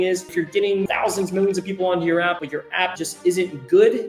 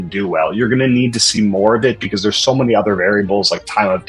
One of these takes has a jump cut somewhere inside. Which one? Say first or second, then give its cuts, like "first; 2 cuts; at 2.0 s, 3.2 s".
first; 2 cuts; at 0.9 s, 2.7 s